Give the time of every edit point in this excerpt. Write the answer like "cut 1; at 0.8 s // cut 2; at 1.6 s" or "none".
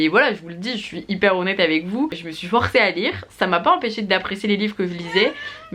none